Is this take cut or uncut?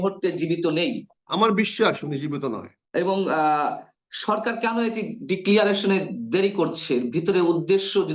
cut